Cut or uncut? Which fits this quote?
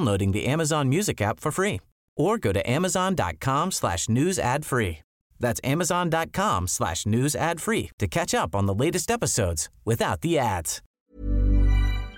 cut